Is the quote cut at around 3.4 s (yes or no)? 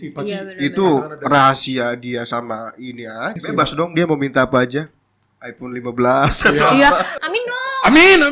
yes